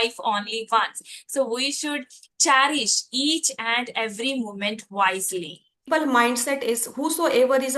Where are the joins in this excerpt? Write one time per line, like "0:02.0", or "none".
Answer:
0:05.8